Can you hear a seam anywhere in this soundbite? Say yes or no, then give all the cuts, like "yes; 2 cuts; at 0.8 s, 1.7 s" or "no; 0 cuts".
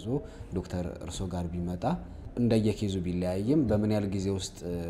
yes; 1 cut; at 2.2 s